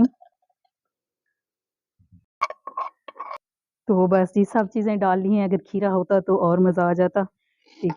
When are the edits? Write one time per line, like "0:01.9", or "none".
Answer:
0:03.4